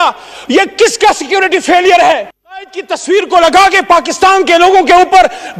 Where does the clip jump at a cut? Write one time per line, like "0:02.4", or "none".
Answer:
0:02.3